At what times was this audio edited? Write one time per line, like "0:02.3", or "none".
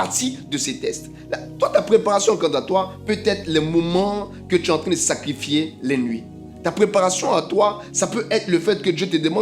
none